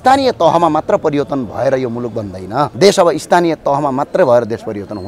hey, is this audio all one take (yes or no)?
no